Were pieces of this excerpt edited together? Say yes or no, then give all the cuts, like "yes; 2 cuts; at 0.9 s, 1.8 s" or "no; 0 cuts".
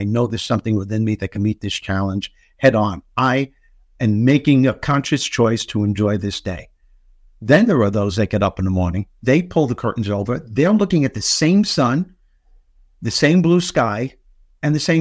yes; 1 cut; at 9.1 s